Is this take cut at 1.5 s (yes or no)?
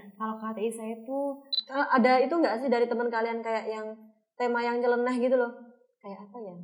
yes